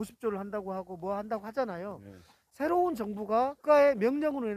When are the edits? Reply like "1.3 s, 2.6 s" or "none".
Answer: 3.6 s